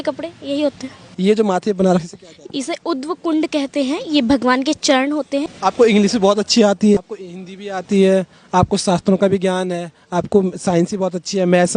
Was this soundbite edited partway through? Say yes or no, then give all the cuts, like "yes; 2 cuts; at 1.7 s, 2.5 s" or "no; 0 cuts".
yes; 3 cuts; at 1.0 s, 5.5 s, 7.0 s